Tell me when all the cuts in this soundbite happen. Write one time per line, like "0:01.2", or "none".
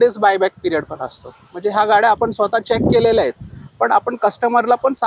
none